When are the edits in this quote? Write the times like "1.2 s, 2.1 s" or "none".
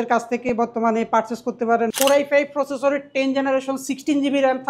1.9 s